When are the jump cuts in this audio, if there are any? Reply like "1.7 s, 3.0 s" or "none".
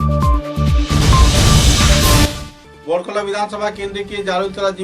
2.2 s